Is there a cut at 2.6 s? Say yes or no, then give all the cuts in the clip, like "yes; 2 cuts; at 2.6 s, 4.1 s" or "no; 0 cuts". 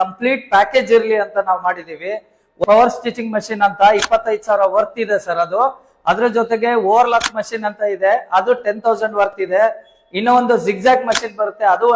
yes; 1 cut; at 2.6 s